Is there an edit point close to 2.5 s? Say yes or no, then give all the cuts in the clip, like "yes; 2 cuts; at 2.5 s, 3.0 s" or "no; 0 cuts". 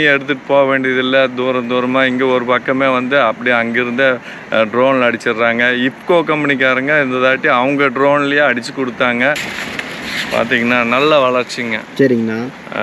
no; 1 cut; at 9.6 s